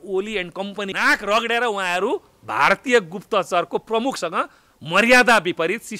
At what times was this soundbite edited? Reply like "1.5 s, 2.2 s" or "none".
0.9 s